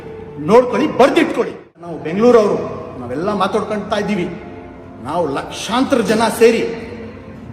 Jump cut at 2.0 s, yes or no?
yes